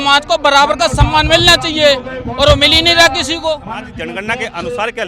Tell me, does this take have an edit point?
yes; 1 cut; at 3.9 s

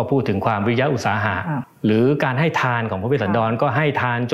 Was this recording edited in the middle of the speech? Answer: yes; 1 cut; at 1.6 s

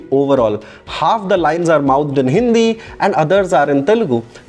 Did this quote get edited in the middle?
no; 0 cuts

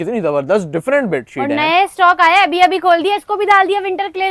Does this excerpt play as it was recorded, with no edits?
yes; 0 cuts

